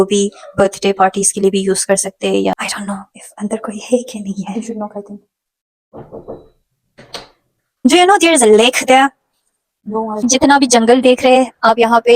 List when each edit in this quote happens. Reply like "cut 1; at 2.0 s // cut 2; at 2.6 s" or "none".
cut 1; at 2.5 s // cut 2; at 7.8 s // cut 3; at 10.3 s